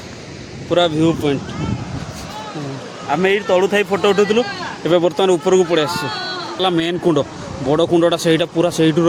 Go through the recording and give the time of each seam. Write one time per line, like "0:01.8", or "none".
0:06.6